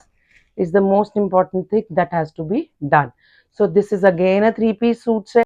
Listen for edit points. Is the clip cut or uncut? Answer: uncut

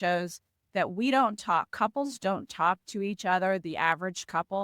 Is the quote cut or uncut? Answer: uncut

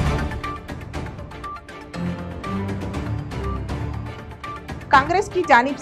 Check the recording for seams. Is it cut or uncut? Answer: cut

